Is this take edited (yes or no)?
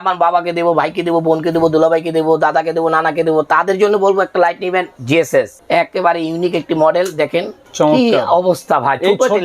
yes